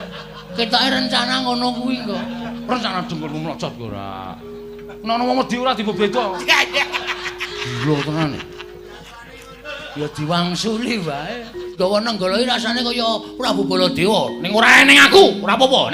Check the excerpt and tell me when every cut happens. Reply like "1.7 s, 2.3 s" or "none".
11.7 s